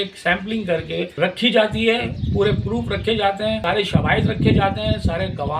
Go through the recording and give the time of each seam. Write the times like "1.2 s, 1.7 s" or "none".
1.1 s, 3.6 s